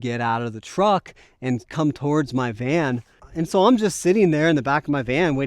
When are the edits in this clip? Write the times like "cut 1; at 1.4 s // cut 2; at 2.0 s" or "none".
cut 1; at 3.1 s